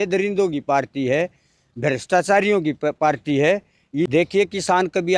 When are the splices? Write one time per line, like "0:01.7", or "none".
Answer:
0:04.1

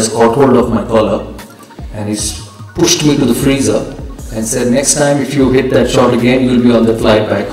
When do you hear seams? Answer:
none

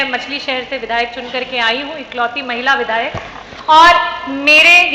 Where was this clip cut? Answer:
none

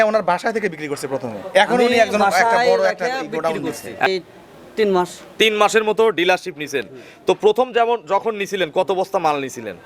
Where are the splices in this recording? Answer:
0:04.1

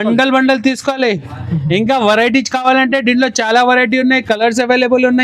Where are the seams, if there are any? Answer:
none

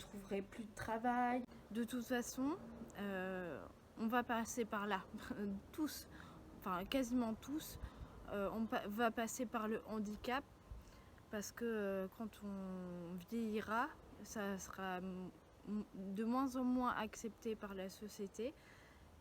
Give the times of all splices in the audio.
0:01.6

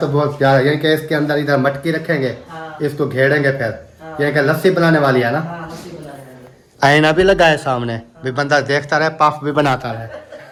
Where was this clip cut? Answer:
none

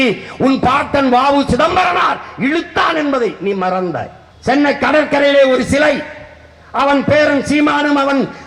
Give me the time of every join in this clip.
0:04.1

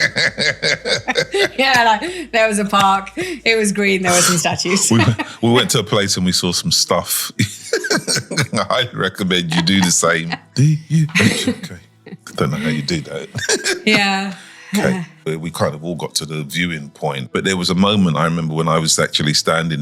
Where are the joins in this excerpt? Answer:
0:10.4
0:15.2
0:17.2

